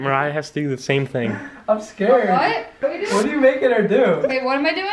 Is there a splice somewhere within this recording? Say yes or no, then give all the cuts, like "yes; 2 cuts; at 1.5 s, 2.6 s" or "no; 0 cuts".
yes; 1 cut; at 2.7 s